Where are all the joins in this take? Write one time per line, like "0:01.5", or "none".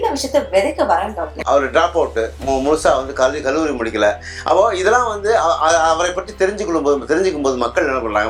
none